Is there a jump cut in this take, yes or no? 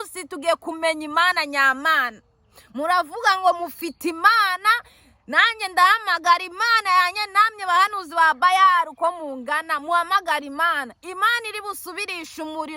no